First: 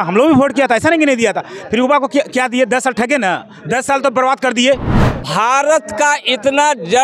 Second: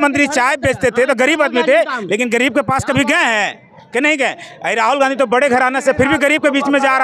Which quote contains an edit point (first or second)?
first